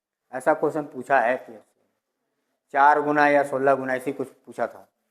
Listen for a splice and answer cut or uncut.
uncut